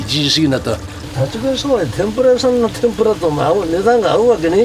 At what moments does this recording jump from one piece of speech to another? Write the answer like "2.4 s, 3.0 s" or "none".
1.0 s

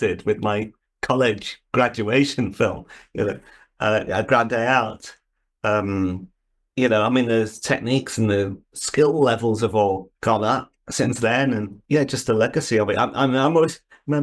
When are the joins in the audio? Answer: 11.7 s

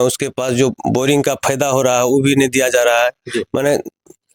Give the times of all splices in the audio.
none

